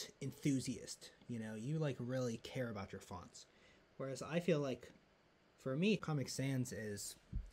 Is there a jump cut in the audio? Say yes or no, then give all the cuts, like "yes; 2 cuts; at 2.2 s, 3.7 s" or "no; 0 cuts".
yes; 1 cut; at 6.0 s